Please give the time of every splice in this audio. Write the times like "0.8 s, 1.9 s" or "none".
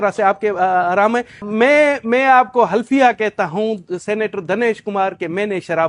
1.5 s